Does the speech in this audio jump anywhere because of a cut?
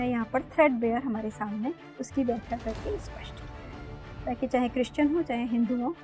no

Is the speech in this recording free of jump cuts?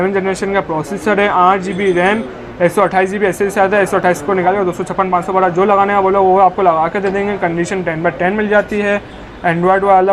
yes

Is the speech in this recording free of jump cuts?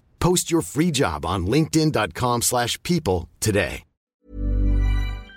no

